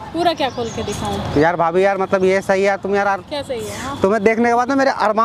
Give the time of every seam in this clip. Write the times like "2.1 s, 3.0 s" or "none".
none